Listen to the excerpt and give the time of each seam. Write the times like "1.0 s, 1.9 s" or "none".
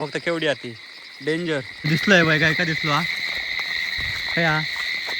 1.7 s